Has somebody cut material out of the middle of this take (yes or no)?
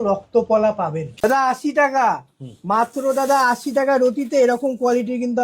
yes